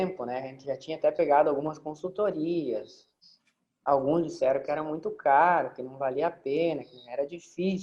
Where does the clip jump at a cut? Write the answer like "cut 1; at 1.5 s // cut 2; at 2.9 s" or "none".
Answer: none